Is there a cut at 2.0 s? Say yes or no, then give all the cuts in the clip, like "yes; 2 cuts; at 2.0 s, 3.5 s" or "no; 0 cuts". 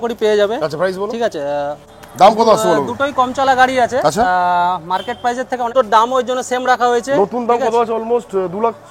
yes; 2 cuts; at 2.0 s, 5.7 s